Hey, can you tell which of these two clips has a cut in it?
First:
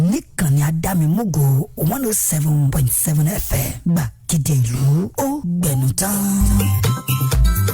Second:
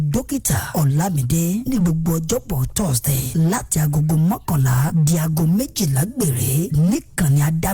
first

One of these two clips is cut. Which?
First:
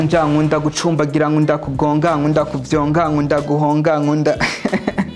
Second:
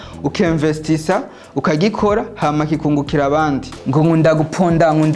second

